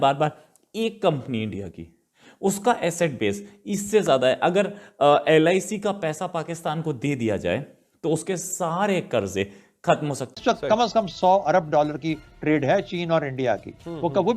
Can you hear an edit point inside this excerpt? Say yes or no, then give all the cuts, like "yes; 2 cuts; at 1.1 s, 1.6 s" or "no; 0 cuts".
yes; 1 cut; at 10.4 s